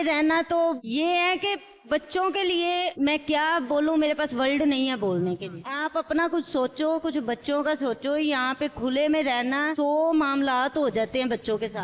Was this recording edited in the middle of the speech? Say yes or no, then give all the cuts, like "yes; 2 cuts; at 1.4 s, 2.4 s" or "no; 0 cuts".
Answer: no; 0 cuts